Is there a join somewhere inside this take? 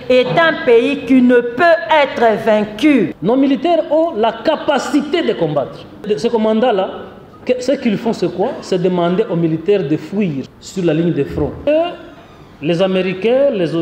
yes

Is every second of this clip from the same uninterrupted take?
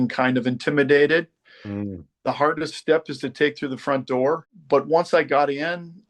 no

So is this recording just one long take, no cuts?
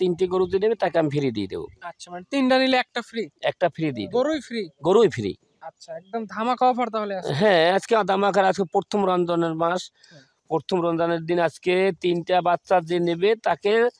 yes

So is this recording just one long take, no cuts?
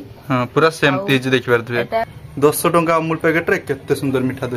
no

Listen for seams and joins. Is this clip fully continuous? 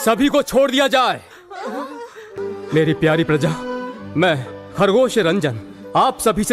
no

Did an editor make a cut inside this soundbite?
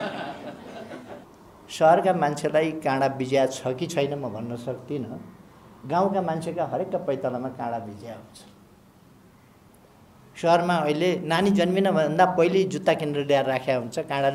yes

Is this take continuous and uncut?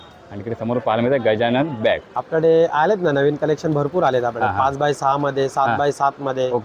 no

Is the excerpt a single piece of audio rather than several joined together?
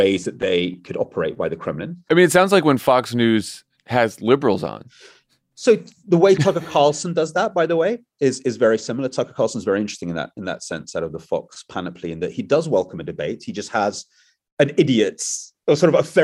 no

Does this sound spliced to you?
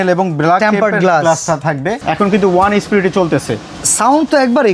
yes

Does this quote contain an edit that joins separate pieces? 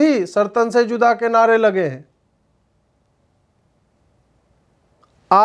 no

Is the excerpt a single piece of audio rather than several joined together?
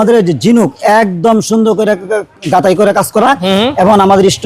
yes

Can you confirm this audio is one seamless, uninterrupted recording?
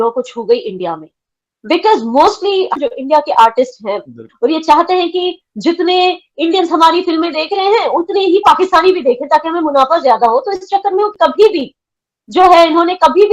no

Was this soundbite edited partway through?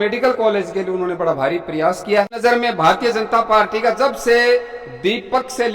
yes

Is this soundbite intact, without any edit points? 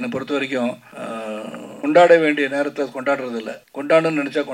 yes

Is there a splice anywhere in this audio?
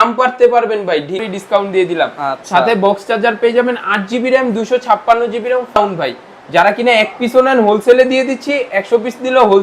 yes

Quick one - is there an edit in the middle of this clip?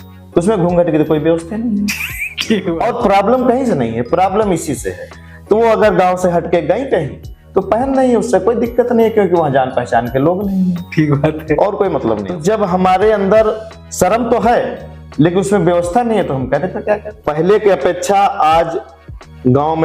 yes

